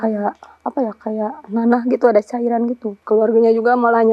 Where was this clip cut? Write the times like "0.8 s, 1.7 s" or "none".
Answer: 2.9 s